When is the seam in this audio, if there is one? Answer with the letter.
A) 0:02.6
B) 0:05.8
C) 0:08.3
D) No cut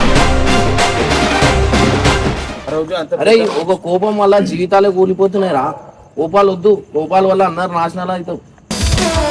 A